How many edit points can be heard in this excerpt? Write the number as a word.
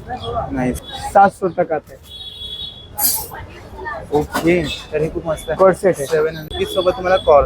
two